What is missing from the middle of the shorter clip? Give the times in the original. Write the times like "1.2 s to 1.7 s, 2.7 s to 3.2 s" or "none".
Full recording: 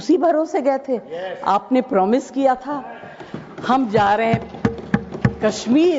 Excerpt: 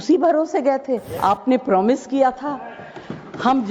1.1 s to 1.3 s

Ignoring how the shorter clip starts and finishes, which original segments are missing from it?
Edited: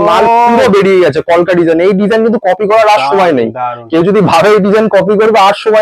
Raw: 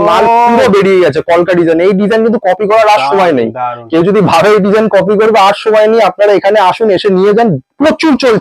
none

